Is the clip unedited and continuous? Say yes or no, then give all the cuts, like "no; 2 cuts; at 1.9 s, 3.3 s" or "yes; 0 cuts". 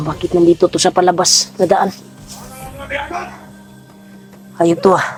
yes; 0 cuts